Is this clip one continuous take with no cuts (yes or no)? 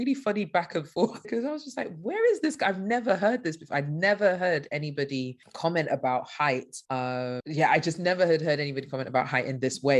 yes